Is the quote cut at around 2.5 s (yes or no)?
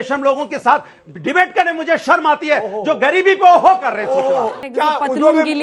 no